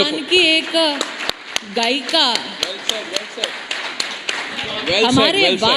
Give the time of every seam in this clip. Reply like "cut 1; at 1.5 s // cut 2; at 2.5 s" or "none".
cut 1; at 4.5 s